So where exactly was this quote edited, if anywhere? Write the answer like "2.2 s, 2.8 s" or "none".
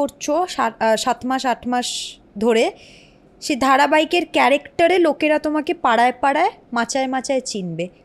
none

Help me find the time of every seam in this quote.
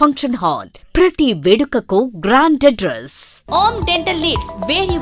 3.4 s

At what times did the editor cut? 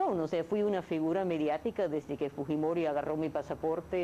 2.5 s

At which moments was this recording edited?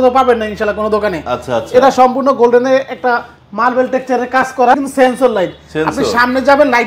4.8 s

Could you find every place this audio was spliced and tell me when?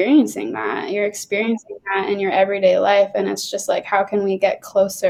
none

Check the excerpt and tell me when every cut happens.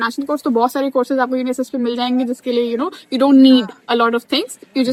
none

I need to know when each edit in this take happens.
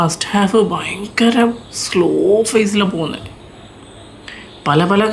none

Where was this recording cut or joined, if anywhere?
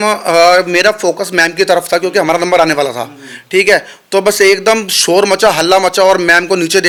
none

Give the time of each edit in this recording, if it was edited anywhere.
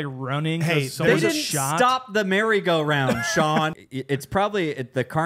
3.7 s

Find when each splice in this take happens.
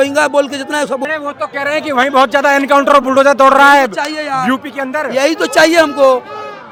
none

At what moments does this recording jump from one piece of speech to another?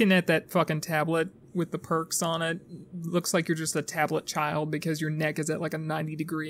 none

